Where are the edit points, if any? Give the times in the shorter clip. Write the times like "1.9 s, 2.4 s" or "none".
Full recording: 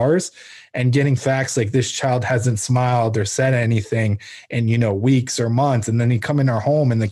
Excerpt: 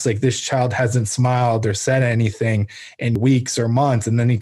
3.2 s